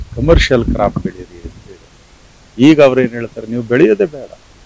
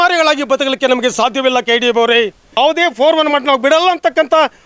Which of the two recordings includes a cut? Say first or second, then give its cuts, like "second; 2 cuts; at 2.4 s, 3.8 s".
second; 1 cut; at 2.6 s